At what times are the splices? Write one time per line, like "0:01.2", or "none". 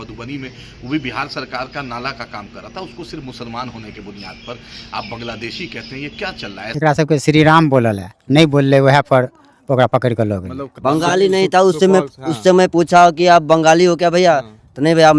0:06.7
0:10.6